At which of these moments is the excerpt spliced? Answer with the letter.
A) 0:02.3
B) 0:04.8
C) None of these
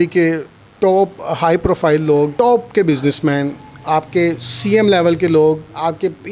A